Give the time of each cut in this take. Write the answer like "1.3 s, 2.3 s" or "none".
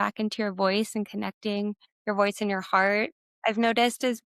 1.9 s, 3.2 s